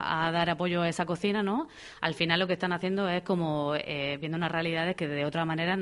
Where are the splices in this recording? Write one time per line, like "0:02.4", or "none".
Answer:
none

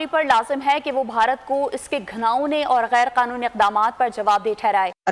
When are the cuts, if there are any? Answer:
none

